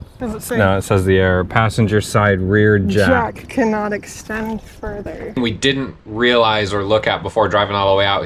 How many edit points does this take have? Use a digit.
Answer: 1